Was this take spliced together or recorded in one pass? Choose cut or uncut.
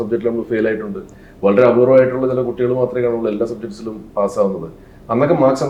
uncut